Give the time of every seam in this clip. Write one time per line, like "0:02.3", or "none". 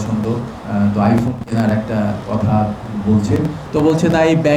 0:03.6